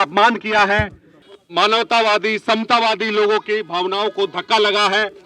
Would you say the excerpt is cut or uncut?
cut